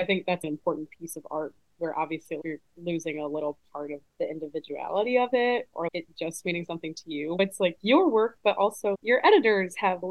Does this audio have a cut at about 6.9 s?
no; 0 cuts

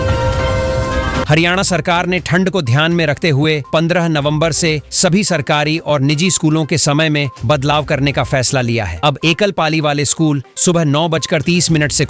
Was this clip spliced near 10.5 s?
no; 1 cut; at 1.3 s

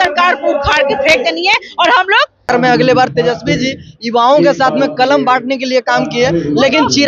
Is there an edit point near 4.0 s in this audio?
no; 1 cut; at 2.4 s

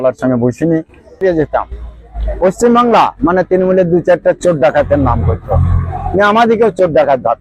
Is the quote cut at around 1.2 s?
yes; 1 cut; at 1.2 s

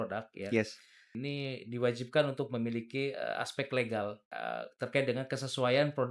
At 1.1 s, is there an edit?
yes; 2 cuts; at 1.1 s, 4.3 s

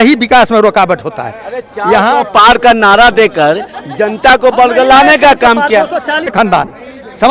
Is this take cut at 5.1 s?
no; 1 cut; at 6.3 s

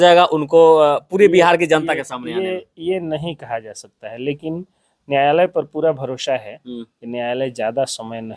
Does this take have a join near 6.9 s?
no; 0 cuts

